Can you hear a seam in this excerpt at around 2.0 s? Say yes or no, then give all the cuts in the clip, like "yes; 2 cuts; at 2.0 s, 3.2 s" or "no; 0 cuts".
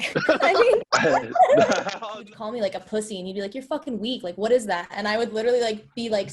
yes; 1 cut; at 2.0 s